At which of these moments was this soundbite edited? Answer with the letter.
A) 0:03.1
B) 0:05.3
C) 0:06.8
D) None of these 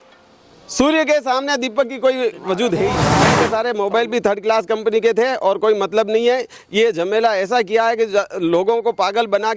A